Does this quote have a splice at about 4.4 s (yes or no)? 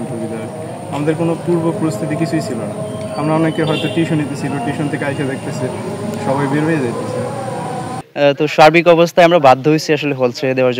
no